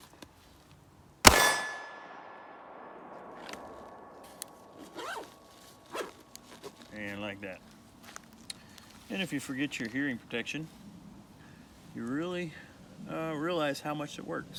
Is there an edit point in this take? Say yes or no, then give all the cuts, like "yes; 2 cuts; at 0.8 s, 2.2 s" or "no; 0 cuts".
no; 0 cuts